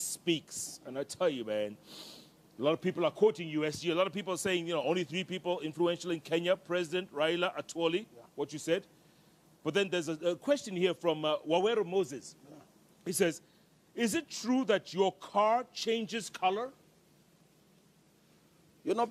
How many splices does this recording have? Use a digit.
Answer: 0